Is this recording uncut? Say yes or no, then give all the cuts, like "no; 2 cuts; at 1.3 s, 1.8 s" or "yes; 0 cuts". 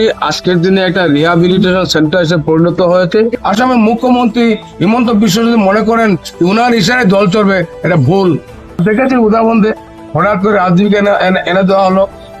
no; 2 cuts; at 3.4 s, 8.8 s